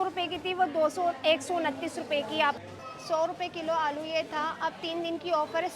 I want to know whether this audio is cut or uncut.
cut